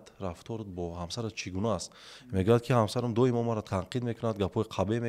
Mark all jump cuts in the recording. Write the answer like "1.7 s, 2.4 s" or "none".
3.6 s